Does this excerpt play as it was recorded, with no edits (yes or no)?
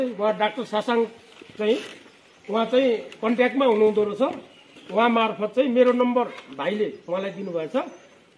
yes